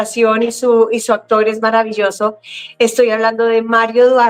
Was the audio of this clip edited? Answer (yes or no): no